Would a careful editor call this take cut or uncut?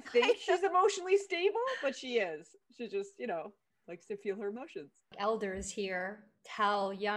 cut